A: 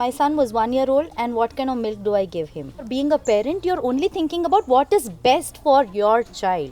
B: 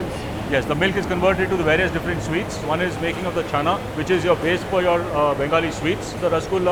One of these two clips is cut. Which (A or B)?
A